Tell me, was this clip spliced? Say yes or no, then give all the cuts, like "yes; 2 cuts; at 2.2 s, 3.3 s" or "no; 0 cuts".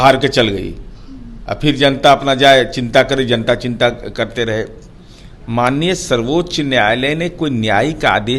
no; 0 cuts